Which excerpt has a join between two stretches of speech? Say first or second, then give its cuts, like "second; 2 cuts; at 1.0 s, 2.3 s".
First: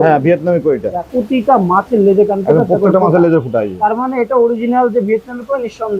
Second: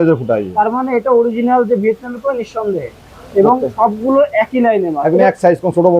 first; 1 cut; at 1.1 s